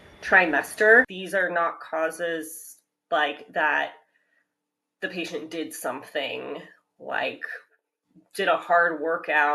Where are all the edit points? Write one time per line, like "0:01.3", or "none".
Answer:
0:01.2